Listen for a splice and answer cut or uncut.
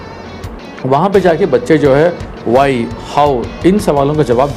uncut